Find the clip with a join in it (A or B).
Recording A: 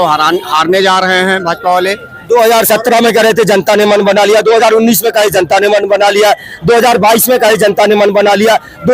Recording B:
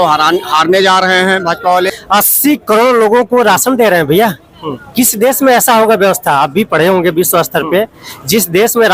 B